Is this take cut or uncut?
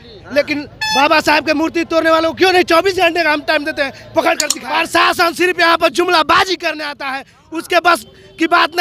cut